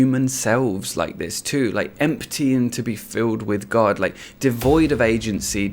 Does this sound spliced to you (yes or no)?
yes